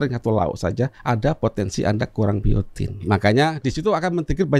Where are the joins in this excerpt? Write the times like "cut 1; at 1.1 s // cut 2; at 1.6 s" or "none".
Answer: cut 1; at 1.0 s // cut 2; at 3.0 s